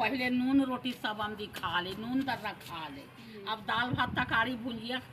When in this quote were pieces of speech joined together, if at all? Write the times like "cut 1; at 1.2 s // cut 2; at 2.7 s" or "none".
none